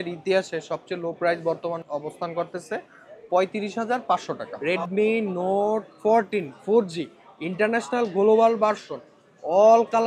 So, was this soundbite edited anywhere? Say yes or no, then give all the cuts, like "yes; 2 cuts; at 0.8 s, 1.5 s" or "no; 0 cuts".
yes; 2 cuts; at 1.8 s, 4.5 s